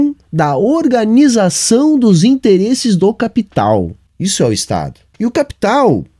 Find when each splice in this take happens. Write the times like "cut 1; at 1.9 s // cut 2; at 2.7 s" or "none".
cut 1; at 4.0 s // cut 2; at 5.0 s